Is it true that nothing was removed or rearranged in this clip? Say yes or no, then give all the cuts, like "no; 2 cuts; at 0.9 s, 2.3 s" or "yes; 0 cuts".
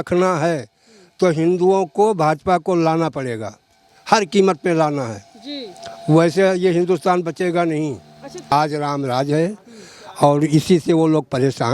no; 1 cut; at 8.5 s